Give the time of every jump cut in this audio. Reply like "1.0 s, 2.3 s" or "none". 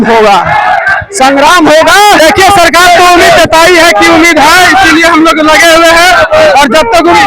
2.2 s